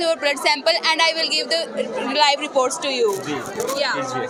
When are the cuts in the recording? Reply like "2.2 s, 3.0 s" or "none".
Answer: none